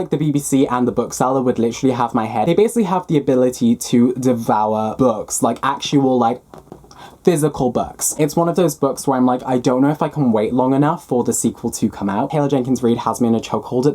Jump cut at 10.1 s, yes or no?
no